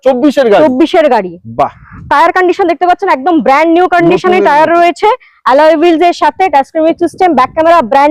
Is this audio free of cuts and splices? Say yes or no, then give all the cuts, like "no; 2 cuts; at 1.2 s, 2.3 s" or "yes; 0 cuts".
yes; 0 cuts